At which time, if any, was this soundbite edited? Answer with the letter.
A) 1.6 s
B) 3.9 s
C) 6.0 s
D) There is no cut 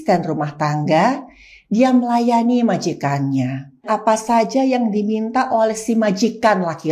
B